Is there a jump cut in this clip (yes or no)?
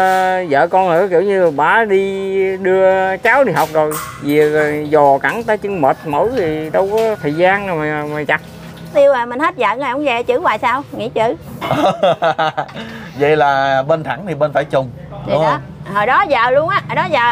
yes